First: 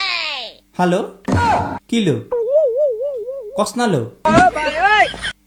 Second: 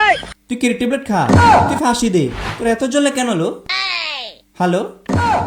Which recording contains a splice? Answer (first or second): second